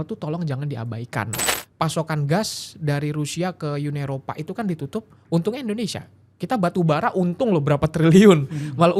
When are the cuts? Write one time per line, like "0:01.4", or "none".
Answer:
0:01.4